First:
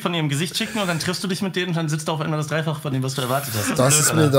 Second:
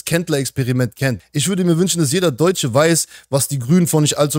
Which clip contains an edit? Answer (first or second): second